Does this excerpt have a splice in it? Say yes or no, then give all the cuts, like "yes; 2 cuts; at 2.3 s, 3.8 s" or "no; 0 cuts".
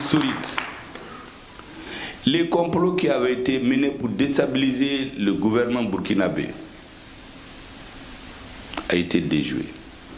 no; 0 cuts